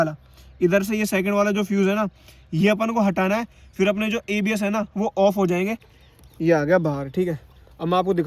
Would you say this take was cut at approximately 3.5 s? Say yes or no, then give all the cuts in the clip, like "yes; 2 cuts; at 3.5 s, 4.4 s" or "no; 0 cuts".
no; 1 cut; at 5.9 s